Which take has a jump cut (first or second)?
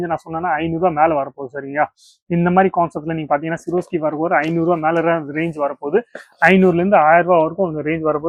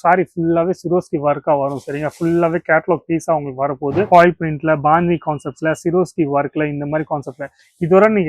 second